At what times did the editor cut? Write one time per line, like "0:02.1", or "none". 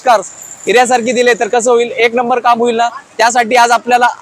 none